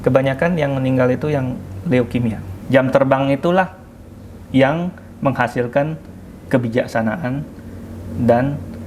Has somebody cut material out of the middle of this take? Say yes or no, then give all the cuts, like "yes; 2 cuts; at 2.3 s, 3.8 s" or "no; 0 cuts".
yes; 1 cut; at 2.5 s